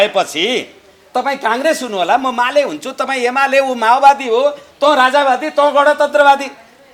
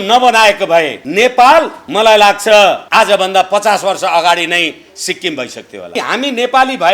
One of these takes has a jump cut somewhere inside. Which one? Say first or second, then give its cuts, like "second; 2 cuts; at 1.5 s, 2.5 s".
second; 4 cuts; at 1.0 s, 1.8 s, 2.8 s, 5.9 s